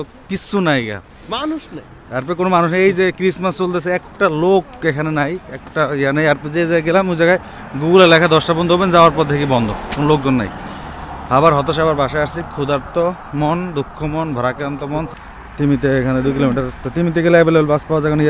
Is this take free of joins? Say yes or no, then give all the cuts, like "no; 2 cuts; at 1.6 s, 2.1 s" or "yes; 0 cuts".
no; 1 cut; at 15.1 s